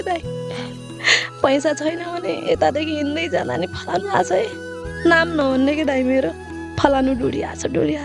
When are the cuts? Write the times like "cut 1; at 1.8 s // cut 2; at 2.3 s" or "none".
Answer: none